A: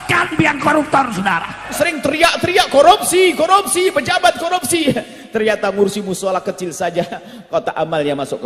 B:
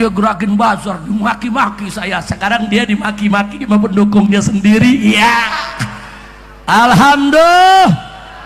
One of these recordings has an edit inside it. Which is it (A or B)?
A